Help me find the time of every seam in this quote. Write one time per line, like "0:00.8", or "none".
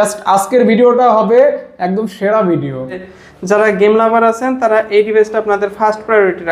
0:03.0